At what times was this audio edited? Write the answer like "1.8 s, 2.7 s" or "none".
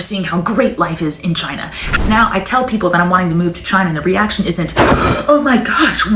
1.8 s